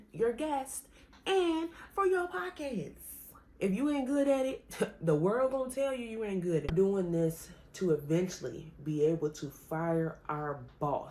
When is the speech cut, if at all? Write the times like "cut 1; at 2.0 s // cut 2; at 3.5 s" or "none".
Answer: cut 1; at 3.4 s // cut 2; at 6.7 s